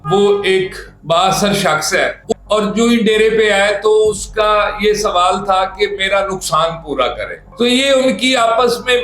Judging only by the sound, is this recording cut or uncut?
cut